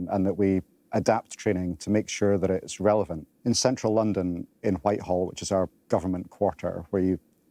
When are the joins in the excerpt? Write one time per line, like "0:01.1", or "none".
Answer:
0:03.2